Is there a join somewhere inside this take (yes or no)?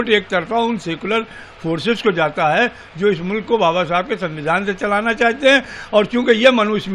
no